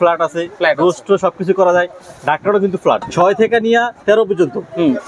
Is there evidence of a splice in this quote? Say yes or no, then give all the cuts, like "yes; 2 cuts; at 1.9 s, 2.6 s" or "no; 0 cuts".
yes; 1 cut; at 3.1 s